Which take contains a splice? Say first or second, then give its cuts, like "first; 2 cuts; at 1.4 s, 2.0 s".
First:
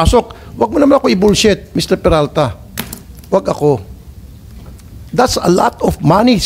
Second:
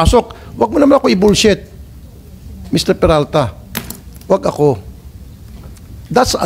first; 1 cut; at 1.7 s